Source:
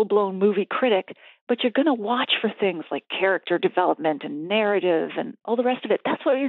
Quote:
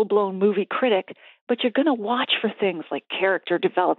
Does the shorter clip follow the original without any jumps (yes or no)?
yes